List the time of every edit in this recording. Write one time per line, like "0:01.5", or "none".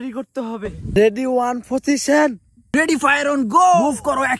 0:00.9
0:02.5